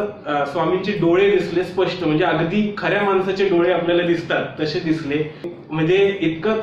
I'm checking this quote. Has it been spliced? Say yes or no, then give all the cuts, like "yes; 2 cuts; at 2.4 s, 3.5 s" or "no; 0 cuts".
yes; 1 cut; at 5.5 s